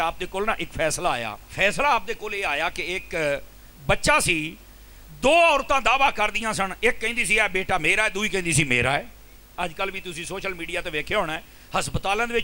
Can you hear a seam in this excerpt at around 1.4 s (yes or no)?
yes